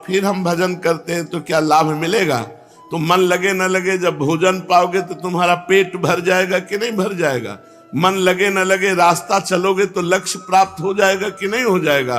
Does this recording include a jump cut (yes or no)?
no